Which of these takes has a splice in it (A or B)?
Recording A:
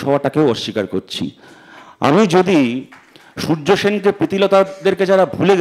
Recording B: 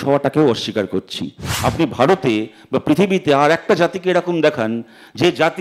B